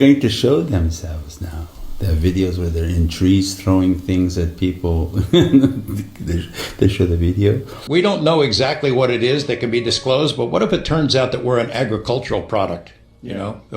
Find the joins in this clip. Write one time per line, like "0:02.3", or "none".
0:07.7